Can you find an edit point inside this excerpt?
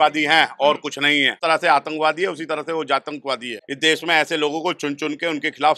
yes; 2 cuts; at 1.4 s, 3.6 s

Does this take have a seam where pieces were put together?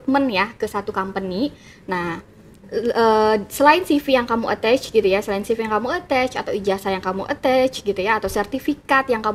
no; 0 cuts

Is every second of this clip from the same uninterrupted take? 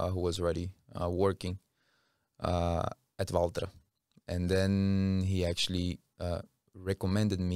yes; 0 cuts

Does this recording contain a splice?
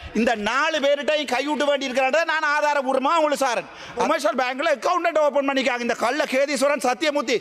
yes; 1 cut; at 4.1 s

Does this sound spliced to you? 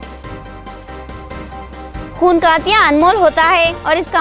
yes; 1 cut; at 1.4 s

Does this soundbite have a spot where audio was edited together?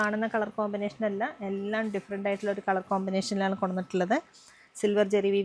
no; 0 cuts

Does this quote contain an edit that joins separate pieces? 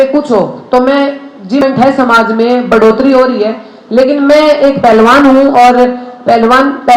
yes; 1 cut; at 1.6 s

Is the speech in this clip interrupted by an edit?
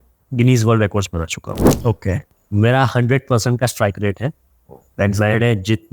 yes; 1 cut; at 2.3 s

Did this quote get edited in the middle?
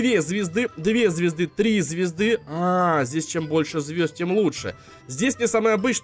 no; 0 cuts

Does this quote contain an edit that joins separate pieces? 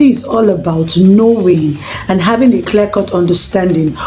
no; 0 cuts

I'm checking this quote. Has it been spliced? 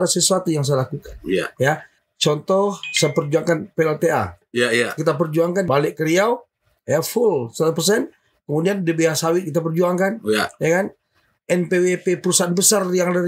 yes; 3 cuts; at 1.9 s, 4.4 s, 5.7 s

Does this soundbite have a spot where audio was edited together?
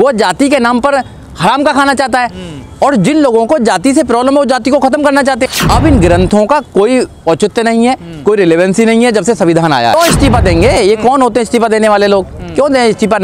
yes; 2 cuts; at 5.5 s, 9.9 s

